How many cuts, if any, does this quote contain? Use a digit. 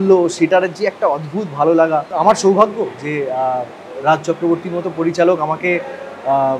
1